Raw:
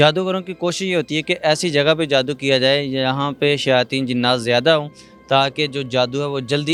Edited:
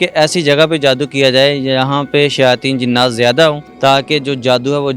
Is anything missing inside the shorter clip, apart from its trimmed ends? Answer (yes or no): yes